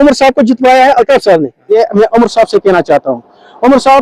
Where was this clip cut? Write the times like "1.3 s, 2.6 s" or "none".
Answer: 1.6 s